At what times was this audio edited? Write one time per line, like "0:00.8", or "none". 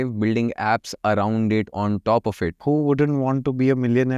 0:02.6